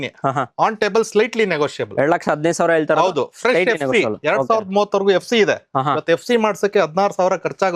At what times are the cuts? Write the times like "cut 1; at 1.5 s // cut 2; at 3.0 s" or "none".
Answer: none